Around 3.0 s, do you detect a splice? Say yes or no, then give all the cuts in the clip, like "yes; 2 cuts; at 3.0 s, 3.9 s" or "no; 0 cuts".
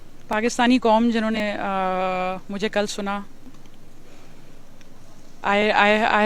no; 1 cut; at 1.4 s